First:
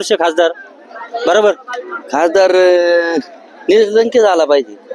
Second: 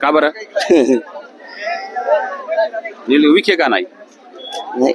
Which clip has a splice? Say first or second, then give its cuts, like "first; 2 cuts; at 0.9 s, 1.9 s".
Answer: first; 1 cut; at 2.0 s